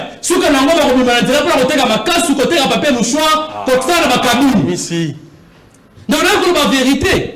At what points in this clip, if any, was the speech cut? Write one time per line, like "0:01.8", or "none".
none